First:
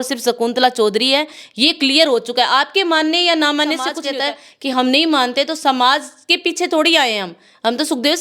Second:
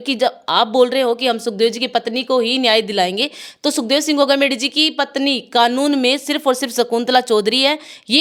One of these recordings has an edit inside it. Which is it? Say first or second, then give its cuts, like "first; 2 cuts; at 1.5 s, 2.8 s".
first; 1 cut; at 4.0 s